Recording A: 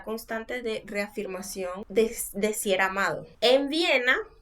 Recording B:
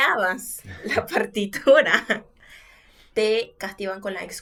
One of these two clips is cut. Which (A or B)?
A